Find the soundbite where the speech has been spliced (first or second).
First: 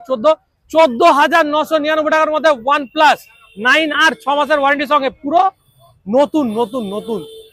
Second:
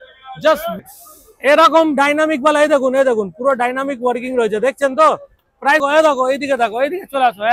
second